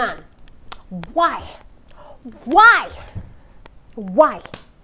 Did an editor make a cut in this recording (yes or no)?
no